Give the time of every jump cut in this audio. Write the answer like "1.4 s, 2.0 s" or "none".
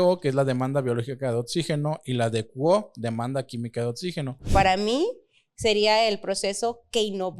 4.5 s